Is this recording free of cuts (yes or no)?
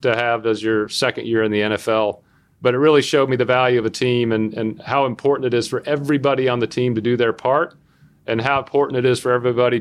yes